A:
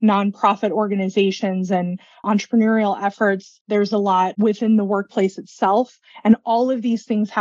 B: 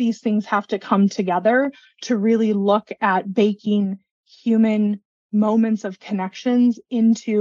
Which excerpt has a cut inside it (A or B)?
A